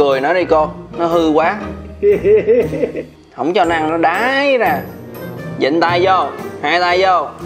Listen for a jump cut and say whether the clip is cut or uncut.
cut